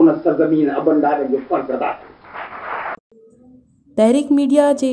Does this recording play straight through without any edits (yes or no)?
no